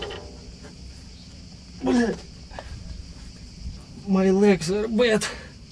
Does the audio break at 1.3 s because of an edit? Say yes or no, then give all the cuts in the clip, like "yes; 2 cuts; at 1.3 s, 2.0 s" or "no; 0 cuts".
no; 1 cut; at 3.8 s